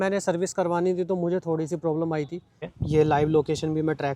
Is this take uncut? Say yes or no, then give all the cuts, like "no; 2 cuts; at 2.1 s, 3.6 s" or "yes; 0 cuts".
no; 1 cut; at 2.6 s